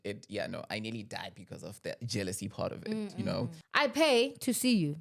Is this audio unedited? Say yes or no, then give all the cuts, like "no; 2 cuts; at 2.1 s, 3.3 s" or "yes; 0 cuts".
no; 1 cut; at 3.6 s